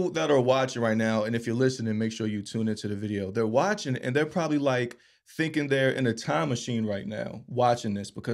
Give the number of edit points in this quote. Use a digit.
0